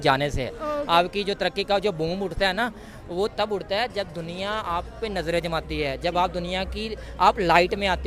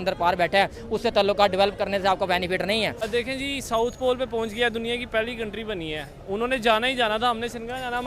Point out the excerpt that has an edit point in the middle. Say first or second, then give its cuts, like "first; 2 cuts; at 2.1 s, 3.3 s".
second; 1 cut; at 3.0 s